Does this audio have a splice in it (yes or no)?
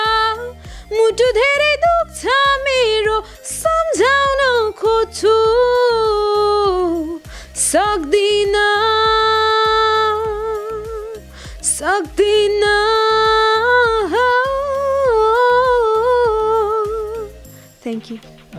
no